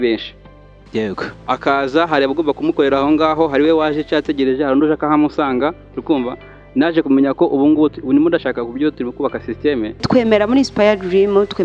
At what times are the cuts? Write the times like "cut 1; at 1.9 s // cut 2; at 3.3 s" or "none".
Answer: cut 1; at 10.0 s